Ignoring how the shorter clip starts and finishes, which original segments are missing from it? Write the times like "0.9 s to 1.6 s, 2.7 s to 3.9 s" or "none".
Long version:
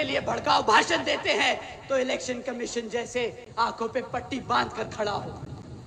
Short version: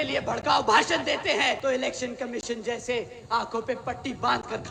1.6 s to 1.9 s